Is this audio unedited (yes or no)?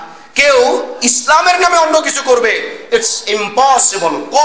yes